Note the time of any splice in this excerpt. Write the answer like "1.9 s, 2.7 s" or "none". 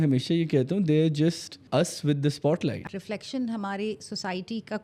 1.5 s, 2.8 s